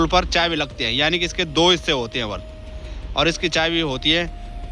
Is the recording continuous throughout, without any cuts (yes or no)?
yes